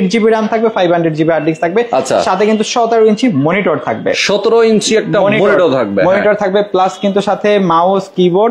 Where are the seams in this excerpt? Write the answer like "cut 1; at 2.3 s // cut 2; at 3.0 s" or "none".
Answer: none